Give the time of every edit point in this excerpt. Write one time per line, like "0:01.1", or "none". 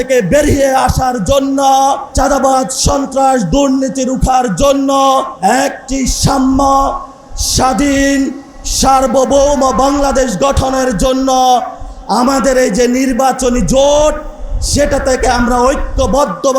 0:02.1
0:05.3